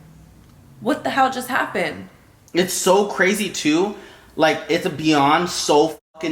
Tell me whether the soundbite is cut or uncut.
cut